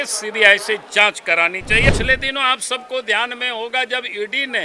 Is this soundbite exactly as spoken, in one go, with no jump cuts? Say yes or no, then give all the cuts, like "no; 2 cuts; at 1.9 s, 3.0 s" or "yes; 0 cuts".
no; 1 cut; at 1.9 s